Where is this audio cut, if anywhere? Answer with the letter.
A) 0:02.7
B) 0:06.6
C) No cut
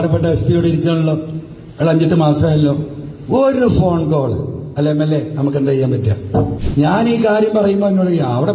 B